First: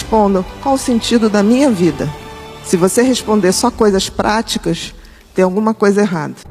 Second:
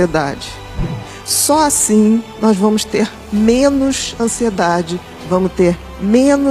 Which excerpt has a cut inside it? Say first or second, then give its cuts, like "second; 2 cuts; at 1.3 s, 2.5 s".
second; 1 cut; at 0.9 s